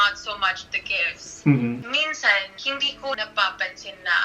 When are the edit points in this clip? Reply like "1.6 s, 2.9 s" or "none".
1.8 s, 3.2 s